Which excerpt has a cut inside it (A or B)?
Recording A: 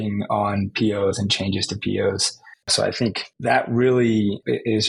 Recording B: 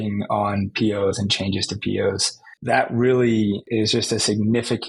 B